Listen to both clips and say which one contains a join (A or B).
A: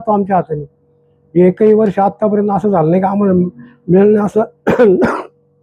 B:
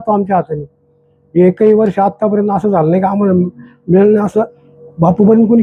B